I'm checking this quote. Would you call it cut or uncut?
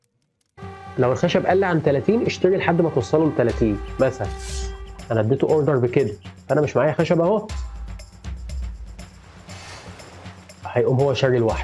uncut